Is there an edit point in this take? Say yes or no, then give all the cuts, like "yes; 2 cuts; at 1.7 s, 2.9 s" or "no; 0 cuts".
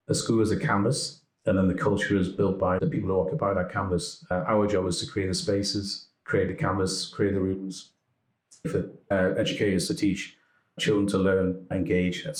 no; 0 cuts